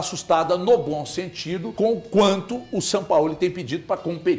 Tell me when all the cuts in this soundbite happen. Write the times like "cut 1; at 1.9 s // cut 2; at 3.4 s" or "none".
cut 1; at 1.6 s